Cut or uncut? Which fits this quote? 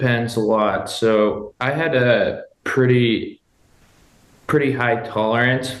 uncut